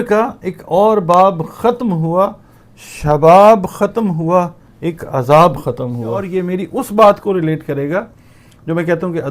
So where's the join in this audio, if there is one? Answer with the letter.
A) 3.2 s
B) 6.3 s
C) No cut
B